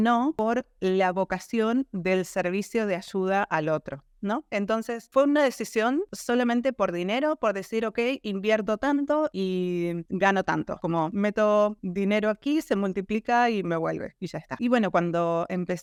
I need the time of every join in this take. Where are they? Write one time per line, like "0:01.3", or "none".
none